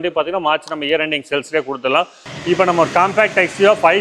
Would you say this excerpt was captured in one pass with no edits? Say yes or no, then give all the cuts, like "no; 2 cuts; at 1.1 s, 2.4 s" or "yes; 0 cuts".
no; 1 cut; at 2.3 s